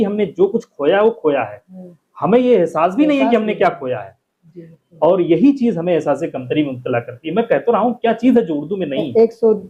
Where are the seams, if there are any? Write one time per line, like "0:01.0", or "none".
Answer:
none